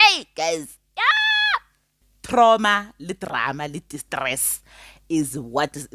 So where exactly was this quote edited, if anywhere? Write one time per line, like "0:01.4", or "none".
0:02.1
0:02.9